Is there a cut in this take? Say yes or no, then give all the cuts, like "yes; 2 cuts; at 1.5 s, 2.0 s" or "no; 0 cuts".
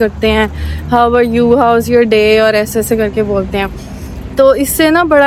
no; 0 cuts